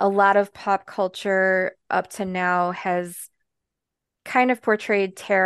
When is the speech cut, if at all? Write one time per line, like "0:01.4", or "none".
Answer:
none

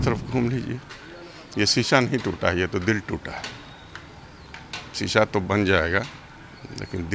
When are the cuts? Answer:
none

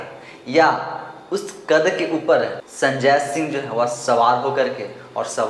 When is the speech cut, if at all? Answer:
0:02.6

